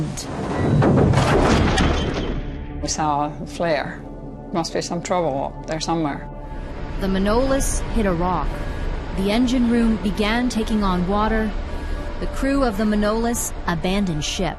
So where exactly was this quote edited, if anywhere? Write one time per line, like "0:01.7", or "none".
0:05.4

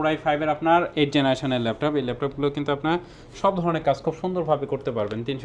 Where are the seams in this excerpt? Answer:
none

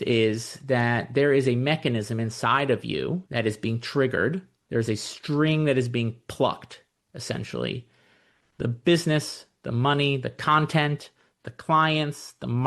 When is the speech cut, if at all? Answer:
0:03.2
0:04.5

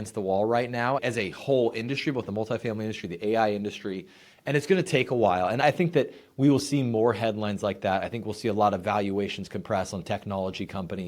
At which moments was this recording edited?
none

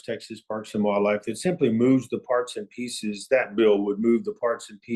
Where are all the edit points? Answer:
none

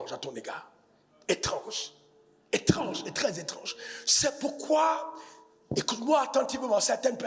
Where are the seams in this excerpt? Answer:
none

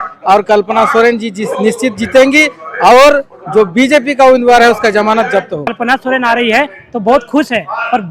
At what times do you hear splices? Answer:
0:05.7

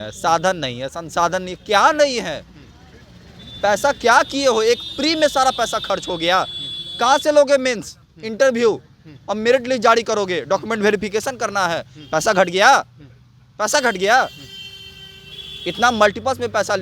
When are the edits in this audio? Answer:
none

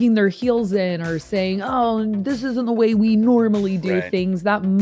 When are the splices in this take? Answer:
none

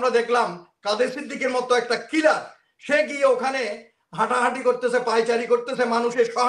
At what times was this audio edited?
none

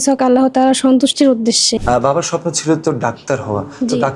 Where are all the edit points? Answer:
0:01.8

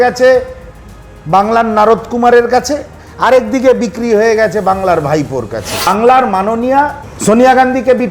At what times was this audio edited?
0:05.9
0:07.0

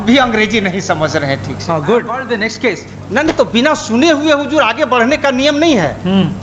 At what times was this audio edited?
0:02.2

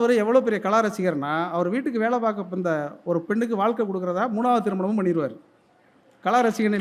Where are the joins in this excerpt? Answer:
none

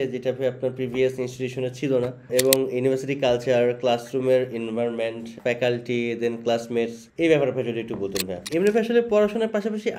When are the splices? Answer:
0:02.3
0:05.3
0:07.0
0:08.4

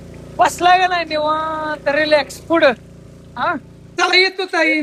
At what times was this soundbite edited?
0:03.8

